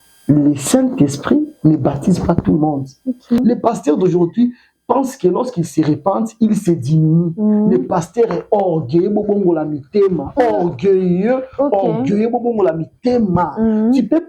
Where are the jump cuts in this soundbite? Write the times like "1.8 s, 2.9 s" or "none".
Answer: 3.4 s